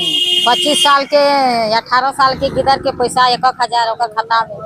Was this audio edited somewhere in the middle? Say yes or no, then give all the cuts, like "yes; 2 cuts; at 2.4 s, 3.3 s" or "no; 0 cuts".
no; 0 cuts